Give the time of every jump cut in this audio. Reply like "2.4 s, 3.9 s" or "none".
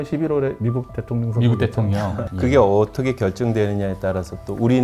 2.2 s

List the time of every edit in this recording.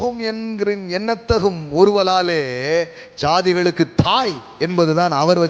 none

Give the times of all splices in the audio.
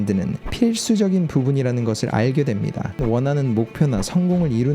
3.0 s

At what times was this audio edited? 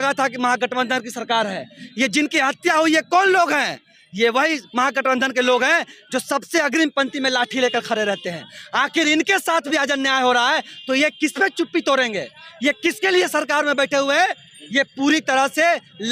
none

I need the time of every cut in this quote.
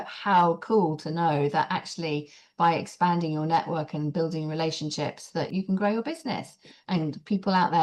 5.5 s

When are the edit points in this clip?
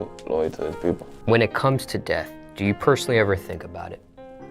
1.2 s

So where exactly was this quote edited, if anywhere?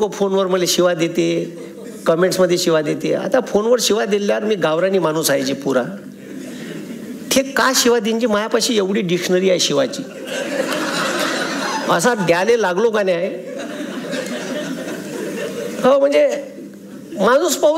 none

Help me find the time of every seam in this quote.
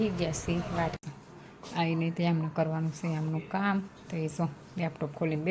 1.0 s

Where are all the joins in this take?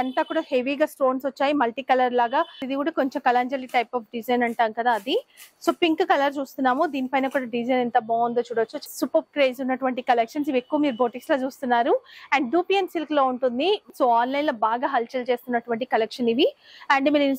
2.6 s, 8.8 s, 13.9 s

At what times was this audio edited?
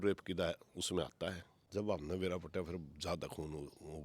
1.5 s

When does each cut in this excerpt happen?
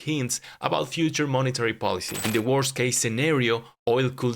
2.2 s

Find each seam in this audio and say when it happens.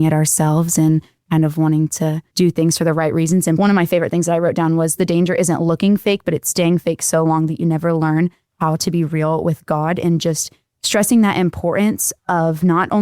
2.2 s, 3.6 s

